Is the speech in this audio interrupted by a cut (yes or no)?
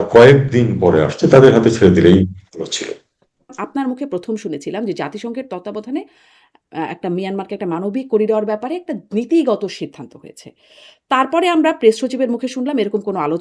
yes